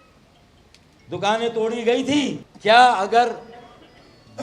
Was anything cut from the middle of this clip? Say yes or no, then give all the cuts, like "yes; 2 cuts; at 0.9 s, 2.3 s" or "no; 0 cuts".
yes; 1 cut; at 2.4 s